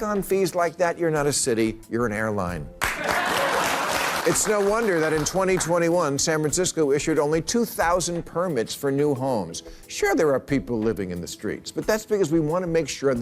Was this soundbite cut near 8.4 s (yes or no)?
no